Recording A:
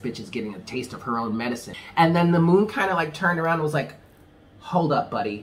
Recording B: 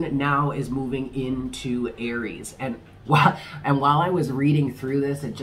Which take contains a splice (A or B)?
A